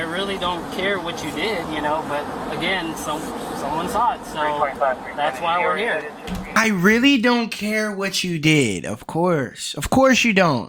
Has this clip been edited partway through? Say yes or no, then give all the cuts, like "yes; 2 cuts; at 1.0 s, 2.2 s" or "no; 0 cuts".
no; 0 cuts